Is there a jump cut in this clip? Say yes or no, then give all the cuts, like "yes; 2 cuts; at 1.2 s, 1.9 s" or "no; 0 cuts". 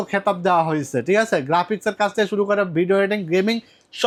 no; 0 cuts